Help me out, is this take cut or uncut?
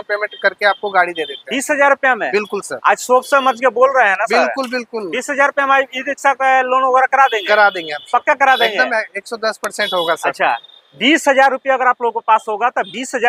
uncut